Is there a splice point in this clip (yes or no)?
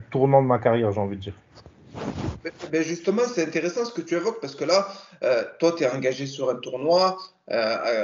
no